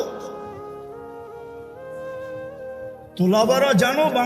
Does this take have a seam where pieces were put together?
yes; 2 cuts; at 0.8 s, 3.1 s

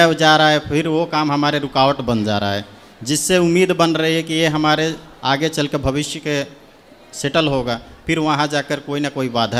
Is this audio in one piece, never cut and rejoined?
yes; 0 cuts

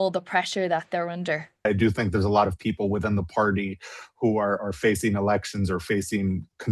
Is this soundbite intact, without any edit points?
no; 1 cut; at 1.7 s

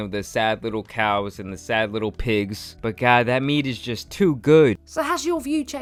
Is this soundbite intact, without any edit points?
yes; 0 cuts

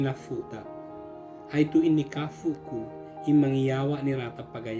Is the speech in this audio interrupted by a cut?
no; 0 cuts

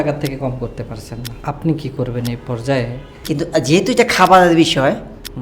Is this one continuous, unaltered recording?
no; 2 cuts; at 1.3 s, 3.2 s

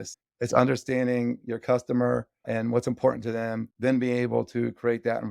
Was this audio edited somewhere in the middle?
yes; 2 cuts; at 2.4 s, 3.7 s

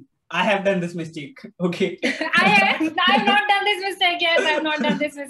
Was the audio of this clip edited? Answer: no; 0 cuts

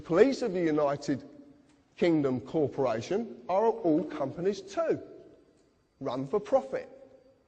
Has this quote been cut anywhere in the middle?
no; 0 cuts

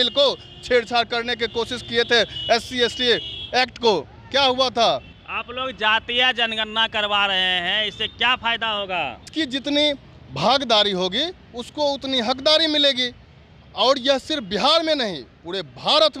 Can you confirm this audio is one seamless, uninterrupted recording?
no; 2 cuts; at 5.1 s, 9.3 s

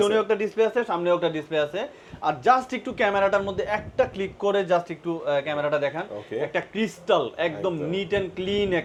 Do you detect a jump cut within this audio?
no; 0 cuts

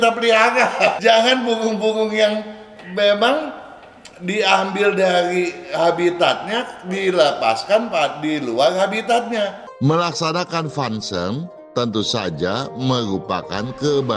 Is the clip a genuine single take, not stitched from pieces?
no; 2 cuts; at 1.0 s, 9.6 s

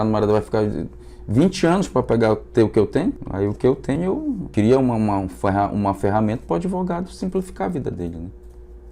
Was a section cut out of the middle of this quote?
yes; 2 cuts; at 3.2 s, 4.0 s

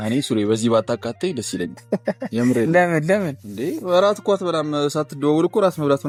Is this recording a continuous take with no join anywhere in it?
yes; 0 cuts

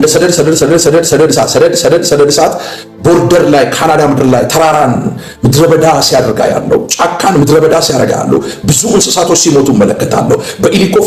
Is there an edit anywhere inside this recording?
no; 0 cuts

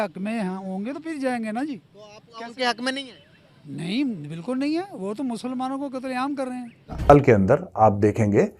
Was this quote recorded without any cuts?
no; 1 cut; at 7.1 s

